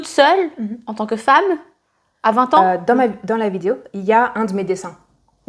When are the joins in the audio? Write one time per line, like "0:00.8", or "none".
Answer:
0:02.6